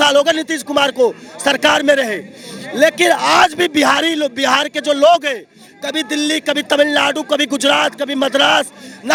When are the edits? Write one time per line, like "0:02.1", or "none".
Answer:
none